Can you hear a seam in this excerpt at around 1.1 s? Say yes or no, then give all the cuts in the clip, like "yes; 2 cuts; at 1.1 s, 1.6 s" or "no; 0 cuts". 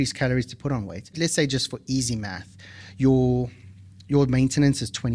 yes; 1 cut; at 1.1 s